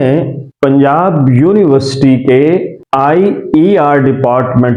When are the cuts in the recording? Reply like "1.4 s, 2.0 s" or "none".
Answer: none